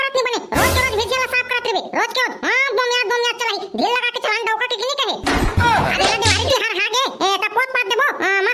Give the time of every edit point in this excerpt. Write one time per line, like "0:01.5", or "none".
none